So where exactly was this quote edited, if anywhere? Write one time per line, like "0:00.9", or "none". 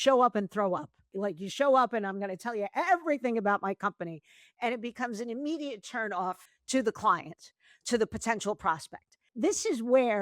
0:01.1
0:06.5
0:09.3

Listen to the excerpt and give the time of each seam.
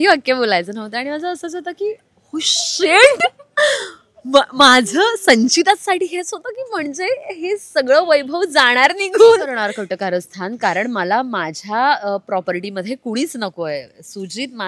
0:09.7

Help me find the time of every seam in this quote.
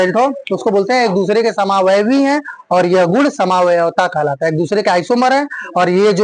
none

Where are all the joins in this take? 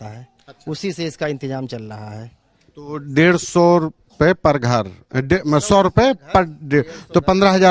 none

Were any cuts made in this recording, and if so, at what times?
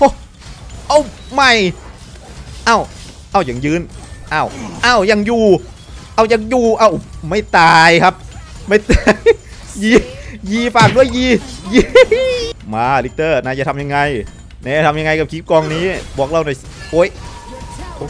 0:12.6

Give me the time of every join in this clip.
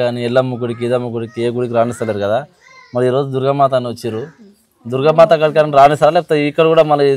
none

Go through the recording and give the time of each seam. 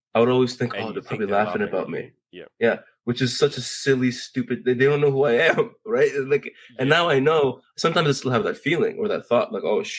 none

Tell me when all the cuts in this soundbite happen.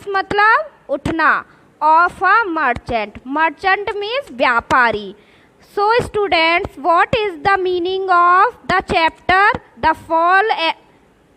none

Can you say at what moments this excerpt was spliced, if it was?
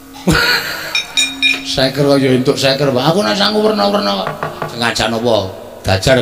0:04.7

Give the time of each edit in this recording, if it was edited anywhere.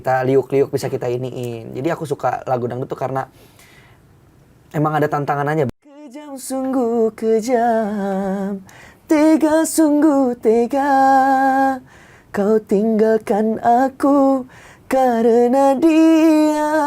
0:06.4

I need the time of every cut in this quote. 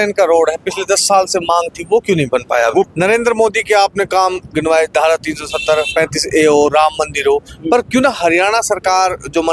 0:02.9

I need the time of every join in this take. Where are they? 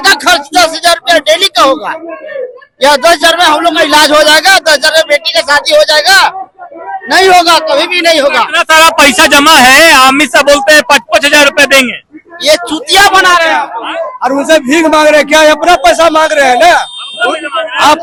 none

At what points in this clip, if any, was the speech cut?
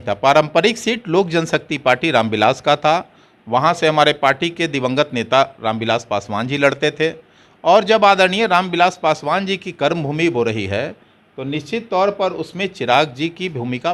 none

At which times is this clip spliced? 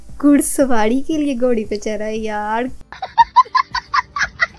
0:02.8

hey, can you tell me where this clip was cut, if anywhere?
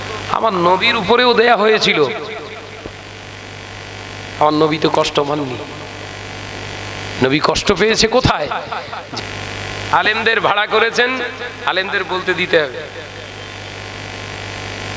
0:09.1

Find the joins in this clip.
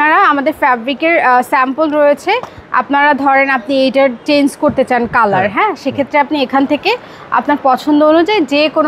none

